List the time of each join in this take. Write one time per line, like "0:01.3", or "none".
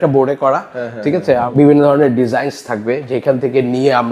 0:01.5

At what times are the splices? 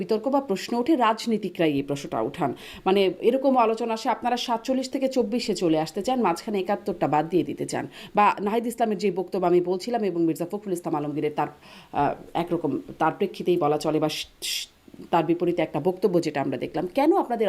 none

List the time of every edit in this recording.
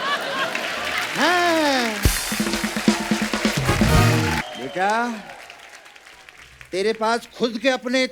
0:04.4

